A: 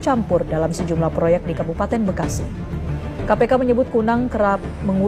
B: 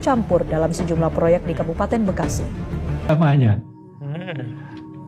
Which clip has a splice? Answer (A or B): B